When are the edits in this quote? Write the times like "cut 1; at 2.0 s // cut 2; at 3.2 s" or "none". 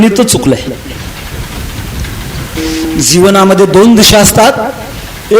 cut 1; at 2.6 s